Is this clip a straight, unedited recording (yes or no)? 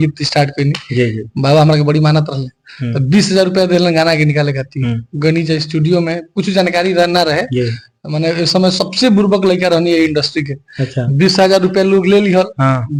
yes